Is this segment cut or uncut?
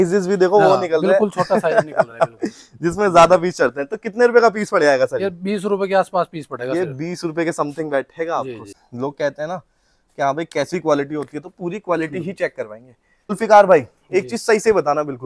cut